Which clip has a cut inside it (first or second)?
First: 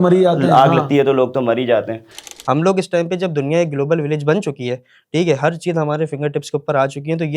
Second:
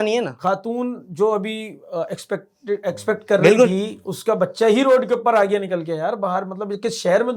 first